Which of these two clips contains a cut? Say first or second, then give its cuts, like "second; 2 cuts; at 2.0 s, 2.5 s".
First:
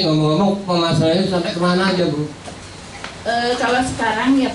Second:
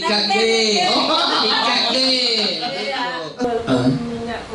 second; 1 cut; at 3.5 s